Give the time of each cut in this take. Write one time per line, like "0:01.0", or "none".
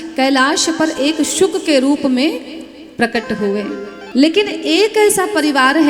0:03.9